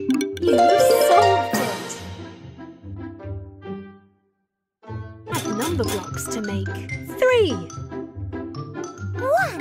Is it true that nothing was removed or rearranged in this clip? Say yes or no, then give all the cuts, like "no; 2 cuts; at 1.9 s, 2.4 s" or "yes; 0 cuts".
no; 1 cut; at 5.3 s